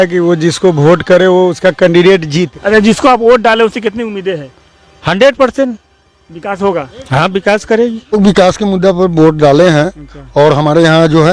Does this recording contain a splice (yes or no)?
yes